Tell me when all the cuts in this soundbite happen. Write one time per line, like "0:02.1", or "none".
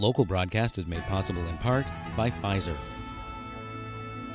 0:02.8